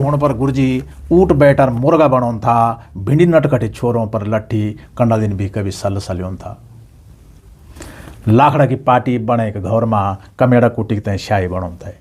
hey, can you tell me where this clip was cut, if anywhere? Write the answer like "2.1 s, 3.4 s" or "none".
none